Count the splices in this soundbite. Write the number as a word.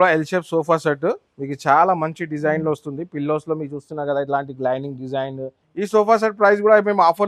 one